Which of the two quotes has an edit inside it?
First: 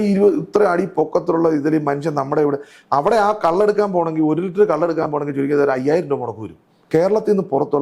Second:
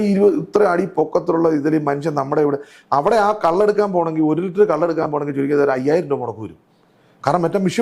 first; 1 cut; at 6.9 s

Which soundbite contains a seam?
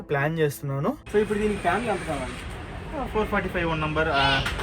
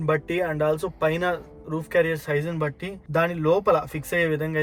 first; 1 cut; at 1.0 s

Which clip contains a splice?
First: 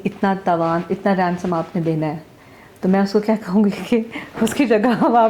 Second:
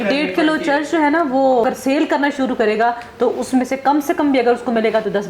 second; 1 cut; at 1.6 s

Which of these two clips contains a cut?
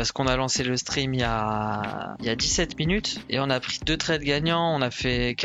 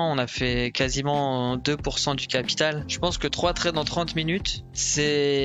second; 1 cut; at 2.9 s

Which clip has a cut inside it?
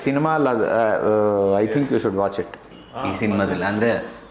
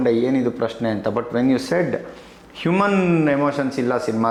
first; 1 cut; at 2.7 s

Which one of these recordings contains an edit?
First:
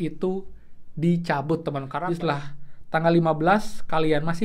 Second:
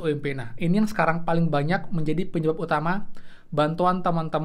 first; 1 cut; at 1.9 s

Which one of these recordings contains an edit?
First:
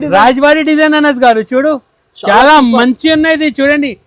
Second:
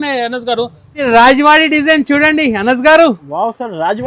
second; 1 cut; at 1.0 s

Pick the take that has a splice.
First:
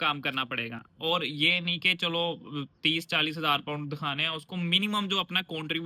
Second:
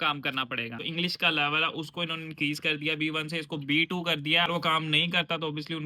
second; 2 cuts; at 0.9 s, 4.5 s

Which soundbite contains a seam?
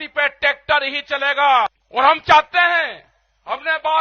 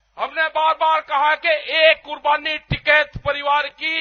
first; 1 cut; at 1.8 s

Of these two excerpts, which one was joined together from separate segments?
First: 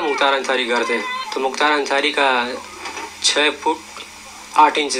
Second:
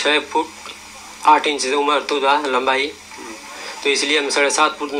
first; 1 cut; at 1.2 s

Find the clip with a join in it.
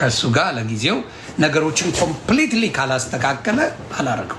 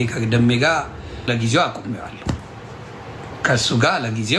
second; 1 cut; at 1.3 s

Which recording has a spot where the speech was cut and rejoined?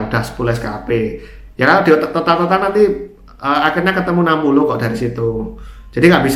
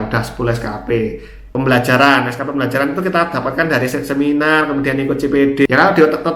second; 2 cuts; at 1.4 s, 5.7 s

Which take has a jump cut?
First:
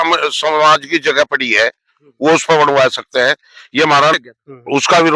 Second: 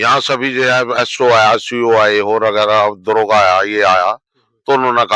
first; 1 cut; at 4.1 s

